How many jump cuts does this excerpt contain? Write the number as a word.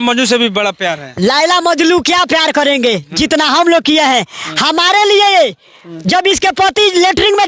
zero